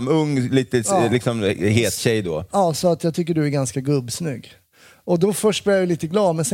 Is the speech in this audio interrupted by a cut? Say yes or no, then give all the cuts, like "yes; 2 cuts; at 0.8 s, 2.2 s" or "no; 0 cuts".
no; 0 cuts